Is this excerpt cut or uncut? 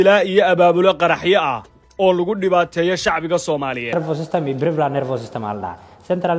cut